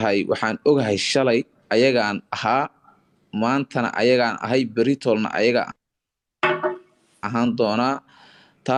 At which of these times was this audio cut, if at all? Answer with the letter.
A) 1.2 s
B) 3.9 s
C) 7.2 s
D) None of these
D